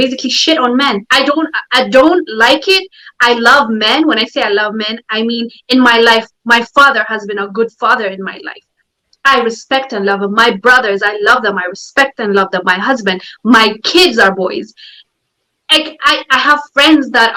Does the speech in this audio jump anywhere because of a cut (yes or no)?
no